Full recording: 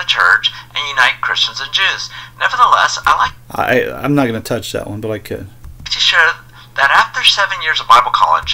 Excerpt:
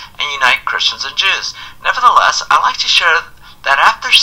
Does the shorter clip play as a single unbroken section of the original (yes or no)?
no